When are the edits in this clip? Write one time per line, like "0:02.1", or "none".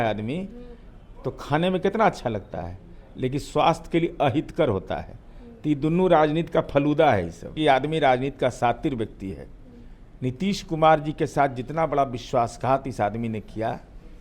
0:07.6